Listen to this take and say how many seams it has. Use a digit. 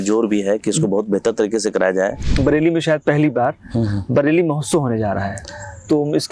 1